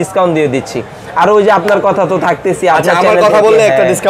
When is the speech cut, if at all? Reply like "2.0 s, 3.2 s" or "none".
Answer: none